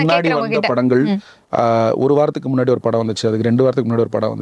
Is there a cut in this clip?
no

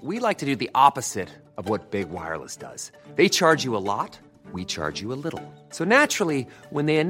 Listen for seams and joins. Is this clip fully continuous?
yes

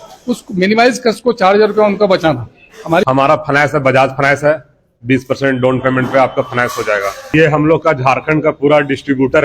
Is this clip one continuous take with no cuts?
no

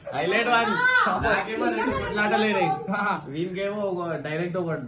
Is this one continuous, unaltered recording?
yes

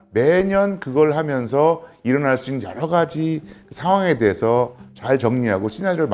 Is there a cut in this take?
no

